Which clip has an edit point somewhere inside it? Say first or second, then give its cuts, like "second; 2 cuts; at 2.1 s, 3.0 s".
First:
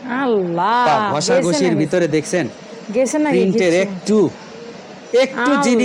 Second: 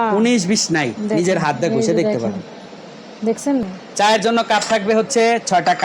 second; 1 cut; at 3.7 s